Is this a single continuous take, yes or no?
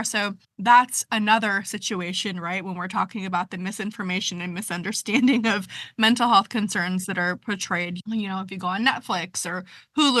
no